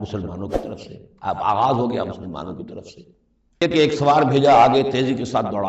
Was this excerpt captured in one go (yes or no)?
no